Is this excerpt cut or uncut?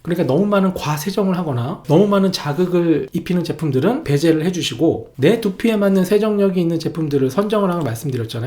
cut